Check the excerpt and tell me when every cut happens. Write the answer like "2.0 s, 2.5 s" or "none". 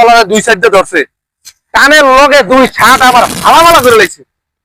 none

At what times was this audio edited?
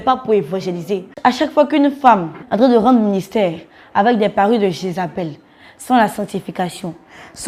1.1 s, 2.4 s

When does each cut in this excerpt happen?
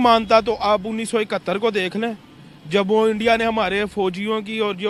none

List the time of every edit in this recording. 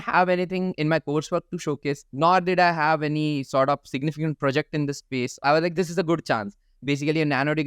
2.1 s, 5.4 s, 6.7 s

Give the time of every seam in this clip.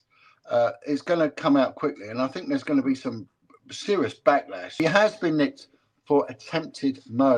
4.7 s

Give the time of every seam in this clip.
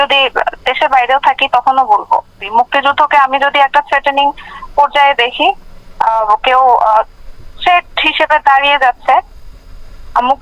2.4 s

